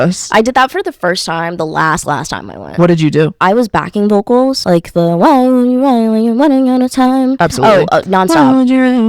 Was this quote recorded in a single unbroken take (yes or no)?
no